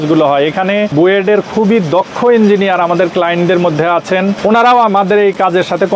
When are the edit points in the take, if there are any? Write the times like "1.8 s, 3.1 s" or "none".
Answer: 0.9 s, 4.4 s